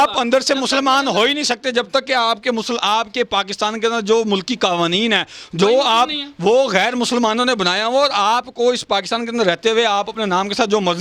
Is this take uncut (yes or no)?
yes